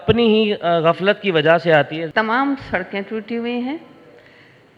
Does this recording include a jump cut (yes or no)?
yes